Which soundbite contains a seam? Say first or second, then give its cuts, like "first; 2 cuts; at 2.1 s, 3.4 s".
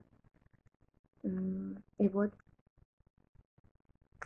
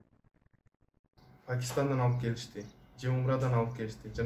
second; 1 cut; at 1.2 s